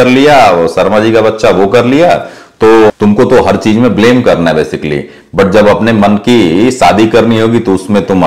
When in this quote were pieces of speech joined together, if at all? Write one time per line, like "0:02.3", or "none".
0:02.9